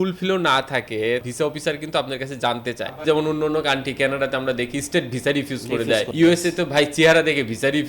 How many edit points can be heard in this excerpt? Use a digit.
2